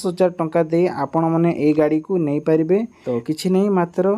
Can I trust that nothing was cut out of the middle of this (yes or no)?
no